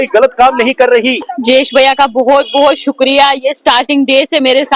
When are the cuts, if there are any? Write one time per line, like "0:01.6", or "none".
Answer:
0:01.3